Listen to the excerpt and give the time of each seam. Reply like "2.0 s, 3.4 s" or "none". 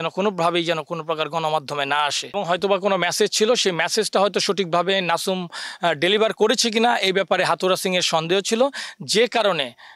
2.3 s